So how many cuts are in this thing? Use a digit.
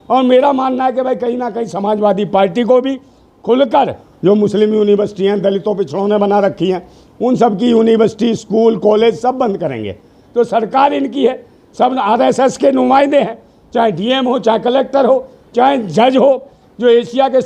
3